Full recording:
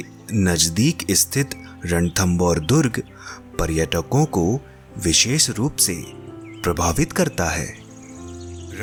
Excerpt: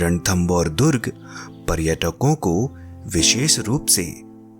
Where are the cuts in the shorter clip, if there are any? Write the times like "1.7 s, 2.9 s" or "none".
none